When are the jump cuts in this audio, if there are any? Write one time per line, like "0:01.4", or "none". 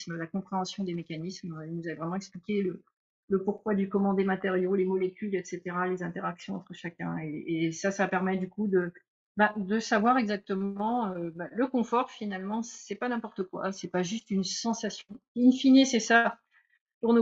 none